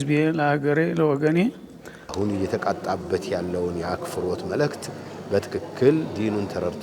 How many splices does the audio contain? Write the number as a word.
one